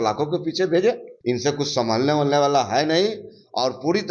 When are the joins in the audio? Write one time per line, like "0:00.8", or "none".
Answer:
0:01.1